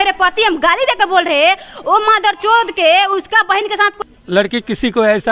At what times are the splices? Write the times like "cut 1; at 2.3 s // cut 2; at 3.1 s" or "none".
cut 1; at 4.0 s